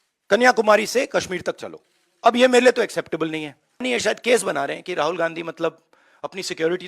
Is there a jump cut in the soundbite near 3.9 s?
yes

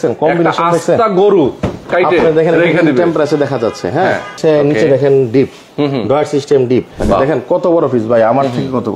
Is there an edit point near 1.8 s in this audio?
no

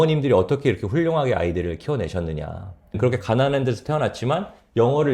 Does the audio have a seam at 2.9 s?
yes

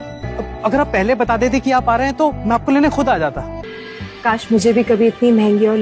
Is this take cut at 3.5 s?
yes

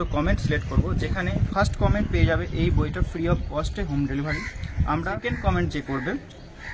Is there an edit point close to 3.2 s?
no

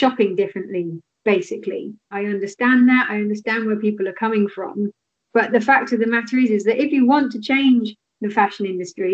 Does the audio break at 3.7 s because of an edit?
no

